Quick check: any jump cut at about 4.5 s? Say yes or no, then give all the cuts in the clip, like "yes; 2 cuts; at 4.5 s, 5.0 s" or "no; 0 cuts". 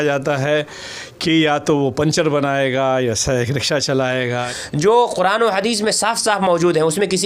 yes; 1 cut; at 4.5 s